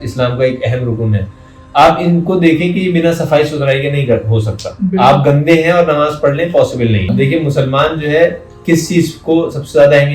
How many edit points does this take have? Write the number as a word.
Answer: one